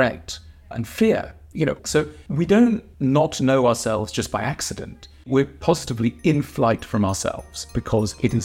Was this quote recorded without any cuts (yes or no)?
no